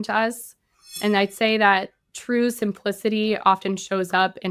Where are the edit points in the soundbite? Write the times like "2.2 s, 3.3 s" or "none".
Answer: 1.0 s